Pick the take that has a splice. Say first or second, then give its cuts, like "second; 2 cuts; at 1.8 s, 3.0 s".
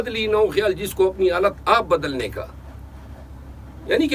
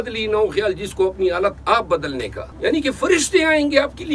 second; 1 cut; at 2.4 s